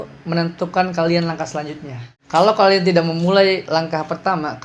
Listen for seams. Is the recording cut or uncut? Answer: cut